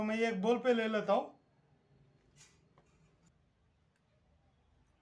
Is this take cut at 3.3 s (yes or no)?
yes